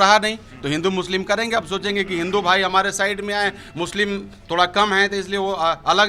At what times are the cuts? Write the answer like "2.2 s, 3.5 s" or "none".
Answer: none